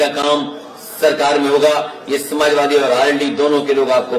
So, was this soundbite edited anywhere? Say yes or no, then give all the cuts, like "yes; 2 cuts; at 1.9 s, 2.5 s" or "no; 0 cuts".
no; 0 cuts